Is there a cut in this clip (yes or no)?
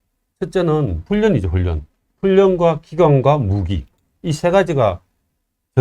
yes